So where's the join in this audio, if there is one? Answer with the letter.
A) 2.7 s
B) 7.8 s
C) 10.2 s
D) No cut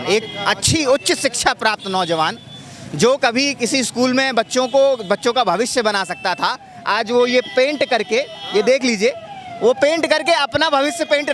D